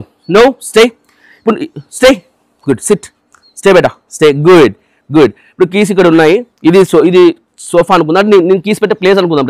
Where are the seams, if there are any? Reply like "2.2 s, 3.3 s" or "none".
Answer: none